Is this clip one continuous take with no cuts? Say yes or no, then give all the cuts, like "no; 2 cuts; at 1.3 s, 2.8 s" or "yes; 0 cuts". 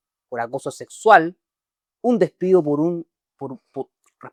yes; 0 cuts